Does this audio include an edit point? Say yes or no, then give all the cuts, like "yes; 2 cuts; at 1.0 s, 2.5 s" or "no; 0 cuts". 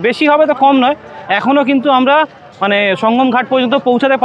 no; 0 cuts